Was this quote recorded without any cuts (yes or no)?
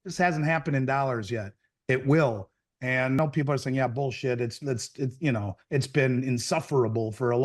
no